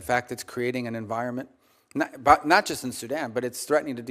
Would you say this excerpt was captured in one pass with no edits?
yes; 0 cuts

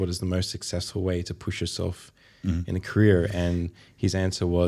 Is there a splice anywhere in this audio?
no; 0 cuts

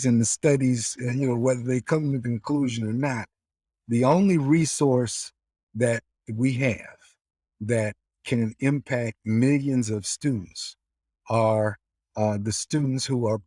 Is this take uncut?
yes; 0 cuts

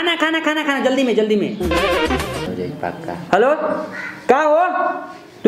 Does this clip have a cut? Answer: yes; 1 cut; at 2.5 s

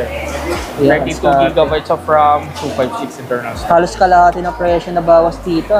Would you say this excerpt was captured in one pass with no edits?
yes; 0 cuts

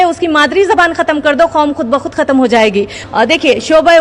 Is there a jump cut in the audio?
yes; 1 cut; at 3.0 s

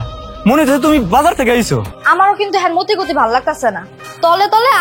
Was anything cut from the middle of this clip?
yes; 1 cut; at 1.9 s

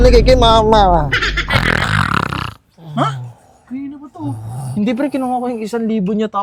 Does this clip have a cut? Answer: no; 0 cuts

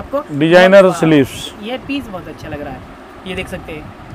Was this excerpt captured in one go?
yes; 0 cuts

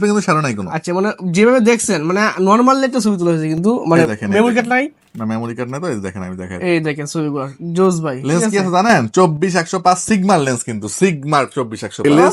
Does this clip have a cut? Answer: no; 0 cuts

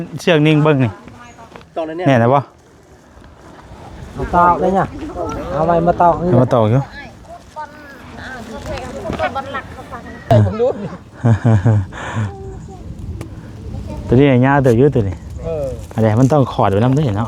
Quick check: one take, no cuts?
no; 2 cuts; at 1.6 s, 10.3 s

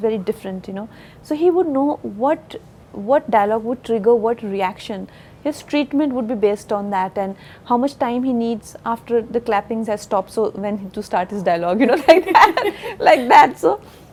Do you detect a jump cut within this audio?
no; 0 cuts

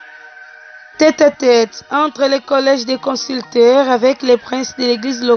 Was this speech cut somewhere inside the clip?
yes; 1 cut; at 1.0 s

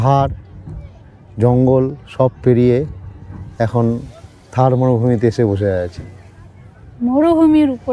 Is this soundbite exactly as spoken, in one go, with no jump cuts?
yes; 0 cuts

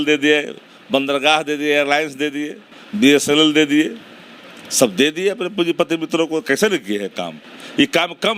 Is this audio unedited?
yes; 0 cuts

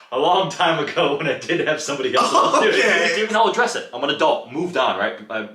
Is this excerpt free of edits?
no; 1 cut; at 3.3 s

